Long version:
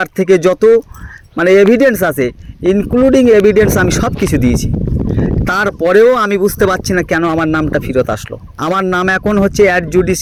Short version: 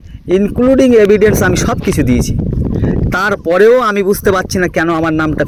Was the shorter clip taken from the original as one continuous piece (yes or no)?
yes